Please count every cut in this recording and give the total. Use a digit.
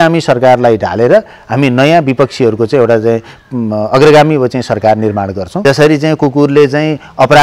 1